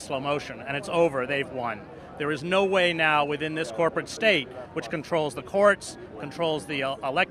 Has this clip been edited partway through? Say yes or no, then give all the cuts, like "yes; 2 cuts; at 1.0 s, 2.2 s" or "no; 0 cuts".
no; 0 cuts